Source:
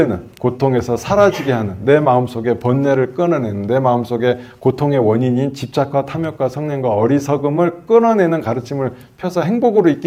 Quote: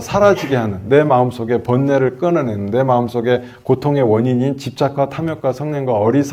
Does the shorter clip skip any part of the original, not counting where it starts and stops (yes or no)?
no